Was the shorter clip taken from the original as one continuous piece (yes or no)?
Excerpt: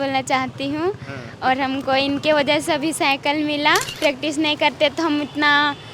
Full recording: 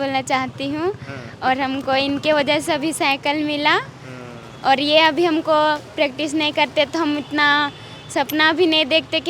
no